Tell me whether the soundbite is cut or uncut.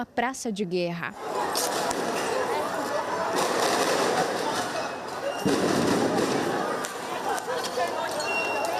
uncut